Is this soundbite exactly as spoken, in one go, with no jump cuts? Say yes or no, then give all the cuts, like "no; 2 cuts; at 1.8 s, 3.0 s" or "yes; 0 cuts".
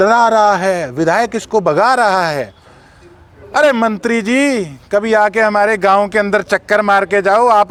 yes; 0 cuts